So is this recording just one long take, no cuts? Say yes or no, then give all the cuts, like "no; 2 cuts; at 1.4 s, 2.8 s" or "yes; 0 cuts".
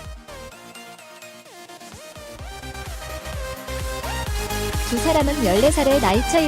yes; 0 cuts